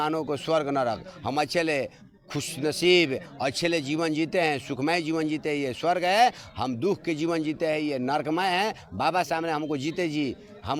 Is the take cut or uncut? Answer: uncut